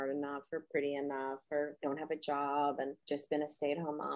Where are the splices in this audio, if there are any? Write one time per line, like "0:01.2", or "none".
0:01.8
0:03.0